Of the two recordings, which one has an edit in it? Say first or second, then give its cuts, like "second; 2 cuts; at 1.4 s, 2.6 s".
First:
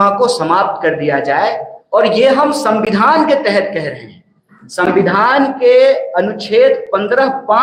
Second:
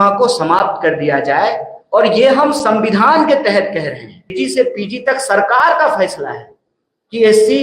second; 1 cut; at 4.3 s